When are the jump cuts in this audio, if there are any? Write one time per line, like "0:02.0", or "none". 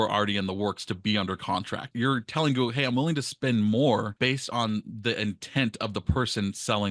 0:01.9
0:04.1